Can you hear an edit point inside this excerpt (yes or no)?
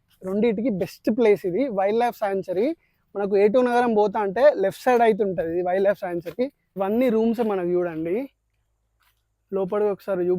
yes